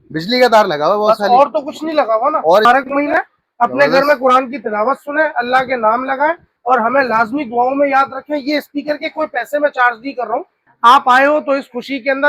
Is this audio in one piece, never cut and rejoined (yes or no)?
no